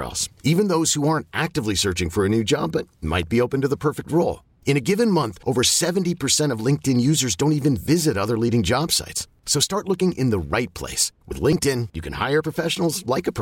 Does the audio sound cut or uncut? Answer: uncut